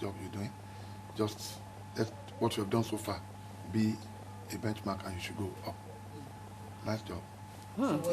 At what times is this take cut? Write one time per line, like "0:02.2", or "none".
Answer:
none